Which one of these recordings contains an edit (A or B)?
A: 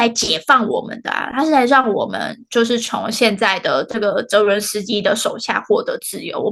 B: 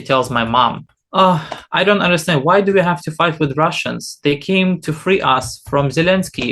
B